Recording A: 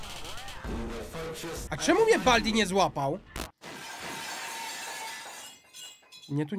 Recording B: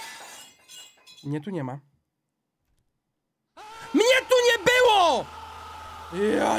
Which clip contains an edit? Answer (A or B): A